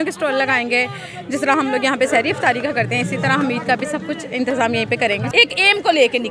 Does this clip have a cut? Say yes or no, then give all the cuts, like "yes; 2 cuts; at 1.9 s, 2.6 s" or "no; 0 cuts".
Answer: yes; 1 cut; at 5.3 s